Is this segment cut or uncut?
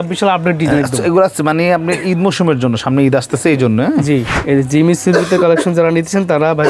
cut